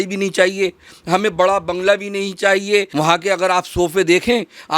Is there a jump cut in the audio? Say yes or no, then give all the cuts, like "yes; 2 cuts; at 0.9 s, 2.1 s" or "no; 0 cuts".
yes; 1 cut; at 2.9 s